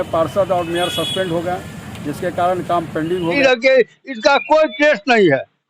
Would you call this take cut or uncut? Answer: cut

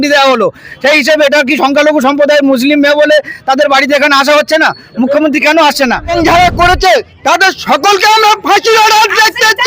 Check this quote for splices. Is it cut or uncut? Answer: cut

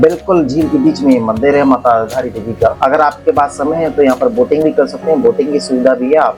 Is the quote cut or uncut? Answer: uncut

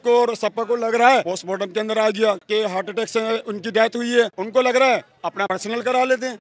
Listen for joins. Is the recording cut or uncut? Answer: uncut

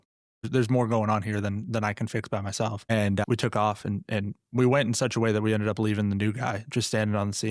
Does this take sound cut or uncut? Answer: cut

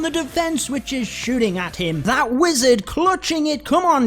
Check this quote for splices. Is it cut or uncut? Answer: cut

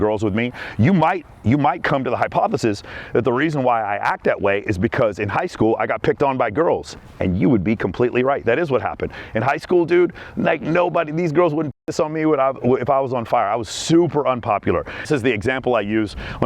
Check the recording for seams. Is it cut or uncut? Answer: cut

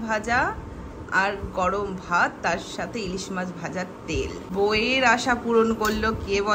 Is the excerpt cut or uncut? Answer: cut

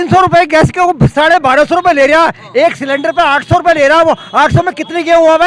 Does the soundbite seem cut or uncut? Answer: uncut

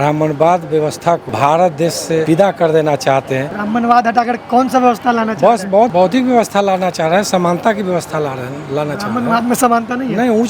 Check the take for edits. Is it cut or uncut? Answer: cut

